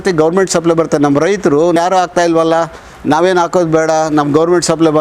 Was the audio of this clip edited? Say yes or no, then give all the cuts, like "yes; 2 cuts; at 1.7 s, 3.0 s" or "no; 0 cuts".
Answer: yes; 1 cut; at 1.8 s